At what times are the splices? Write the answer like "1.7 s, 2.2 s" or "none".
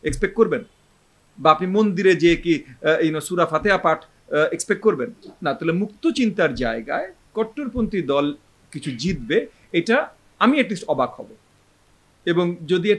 none